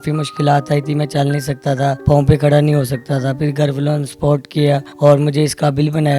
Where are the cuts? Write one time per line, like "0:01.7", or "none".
0:02.0
0:04.9